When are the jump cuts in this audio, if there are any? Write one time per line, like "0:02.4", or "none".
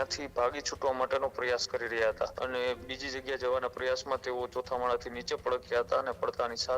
0:02.3